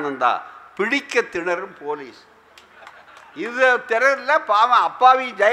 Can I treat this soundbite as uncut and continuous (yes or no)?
yes